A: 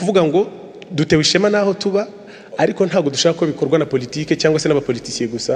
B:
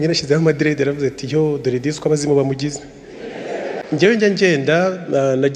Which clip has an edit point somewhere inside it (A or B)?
B